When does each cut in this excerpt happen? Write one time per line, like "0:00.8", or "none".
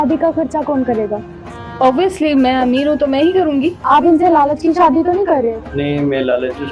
0:03.8